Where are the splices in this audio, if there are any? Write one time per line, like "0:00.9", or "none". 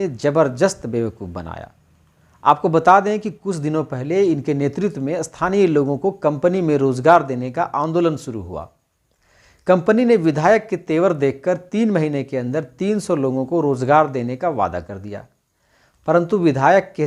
none